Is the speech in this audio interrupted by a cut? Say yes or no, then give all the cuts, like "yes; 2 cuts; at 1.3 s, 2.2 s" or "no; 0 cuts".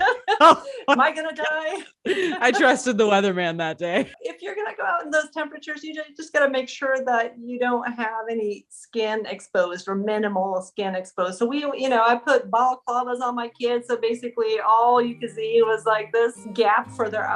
yes; 2 cuts; at 4.2 s, 16.4 s